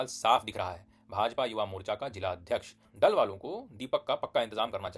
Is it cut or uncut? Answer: cut